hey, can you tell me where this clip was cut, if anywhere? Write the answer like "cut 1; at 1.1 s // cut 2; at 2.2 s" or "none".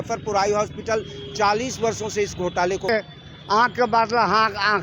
cut 1; at 2.9 s